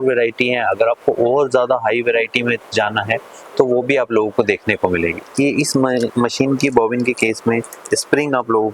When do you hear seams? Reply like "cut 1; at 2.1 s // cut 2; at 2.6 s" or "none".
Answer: cut 1; at 5.2 s